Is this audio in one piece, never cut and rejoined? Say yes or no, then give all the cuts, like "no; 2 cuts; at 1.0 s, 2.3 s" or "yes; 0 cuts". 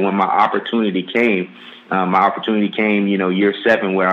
yes; 0 cuts